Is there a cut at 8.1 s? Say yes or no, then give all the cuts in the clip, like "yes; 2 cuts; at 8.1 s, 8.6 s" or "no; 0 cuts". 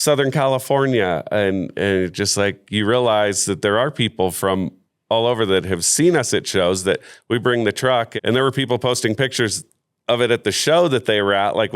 yes; 1 cut; at 8.1 s